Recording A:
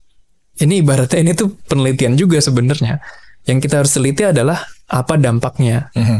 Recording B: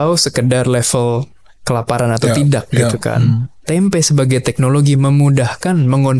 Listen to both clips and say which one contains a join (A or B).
B